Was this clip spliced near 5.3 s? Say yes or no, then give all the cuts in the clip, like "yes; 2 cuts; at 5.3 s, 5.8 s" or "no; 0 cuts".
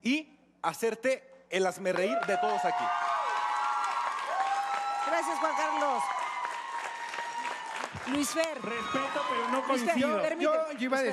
yes; 1 cut; at 5.3 s